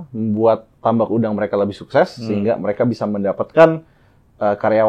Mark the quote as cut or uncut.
uncut